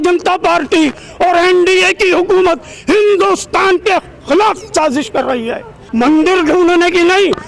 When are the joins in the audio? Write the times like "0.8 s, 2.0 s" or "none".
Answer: 5.8 s